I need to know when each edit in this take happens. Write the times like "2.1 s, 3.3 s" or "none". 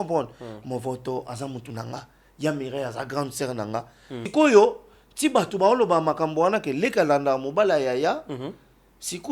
4.2 s